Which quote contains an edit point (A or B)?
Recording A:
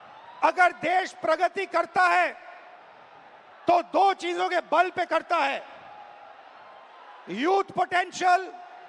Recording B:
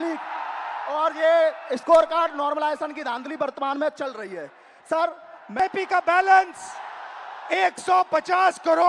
B